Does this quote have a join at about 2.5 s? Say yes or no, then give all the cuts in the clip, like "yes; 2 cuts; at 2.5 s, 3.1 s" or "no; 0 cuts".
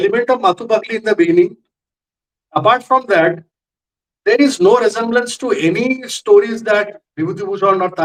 no; 0 cuts